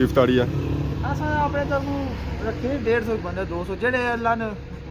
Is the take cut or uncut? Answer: uncut